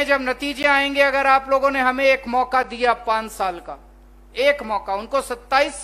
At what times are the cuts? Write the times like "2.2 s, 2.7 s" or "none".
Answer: none